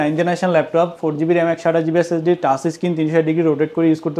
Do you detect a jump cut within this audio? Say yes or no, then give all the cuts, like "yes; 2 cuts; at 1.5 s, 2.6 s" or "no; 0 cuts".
no; 0 cuts